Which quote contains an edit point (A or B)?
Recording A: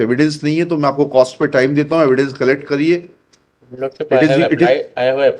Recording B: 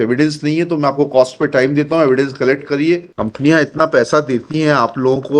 B